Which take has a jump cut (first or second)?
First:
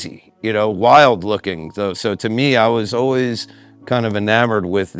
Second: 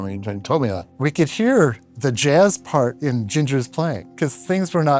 second